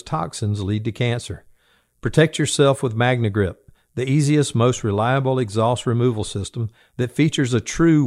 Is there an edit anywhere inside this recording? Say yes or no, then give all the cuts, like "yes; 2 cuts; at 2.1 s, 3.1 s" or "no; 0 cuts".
no; 0 cuts